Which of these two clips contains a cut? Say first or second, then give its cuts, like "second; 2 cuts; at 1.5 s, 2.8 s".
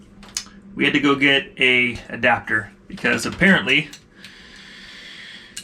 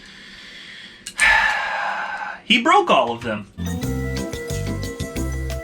second; 1 cut; at 3.5 s